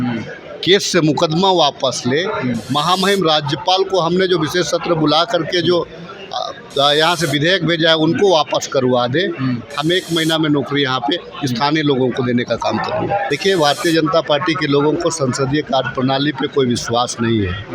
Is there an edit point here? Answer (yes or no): yes